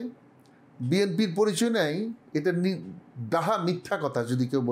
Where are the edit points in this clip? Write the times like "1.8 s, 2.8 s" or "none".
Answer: none

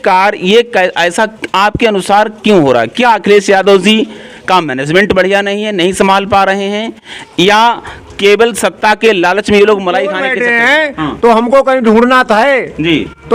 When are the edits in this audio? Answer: 10.3 s

